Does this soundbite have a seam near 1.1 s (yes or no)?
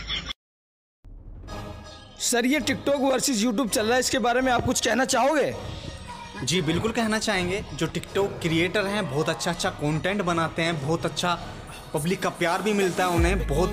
yes